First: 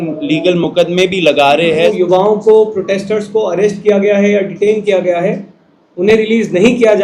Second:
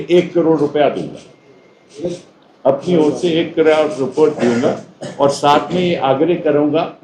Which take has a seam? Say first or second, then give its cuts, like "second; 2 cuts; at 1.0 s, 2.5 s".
first; 1 cut; at 1.9 s